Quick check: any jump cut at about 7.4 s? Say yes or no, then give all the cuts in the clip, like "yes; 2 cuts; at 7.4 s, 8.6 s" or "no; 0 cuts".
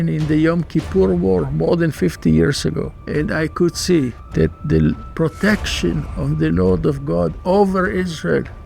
no; 2 cuts; at 2.9 s, 4.2 s